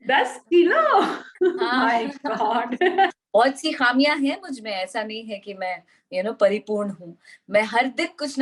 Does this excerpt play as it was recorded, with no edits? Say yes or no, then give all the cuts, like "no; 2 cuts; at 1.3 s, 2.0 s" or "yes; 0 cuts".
no; 1 cut; at 3.1 s